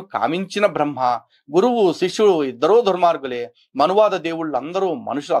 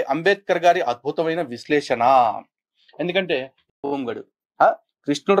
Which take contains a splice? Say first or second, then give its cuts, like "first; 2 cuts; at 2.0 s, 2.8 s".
second; 1 cut; at 3.8 s